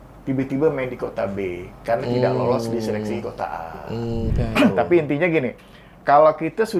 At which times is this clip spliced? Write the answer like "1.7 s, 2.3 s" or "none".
4.3 s